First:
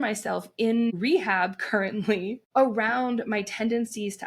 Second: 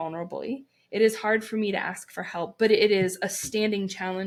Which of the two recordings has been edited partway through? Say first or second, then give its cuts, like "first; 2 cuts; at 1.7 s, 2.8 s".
first; 2 cuts; at 0.9 s, 2.4 s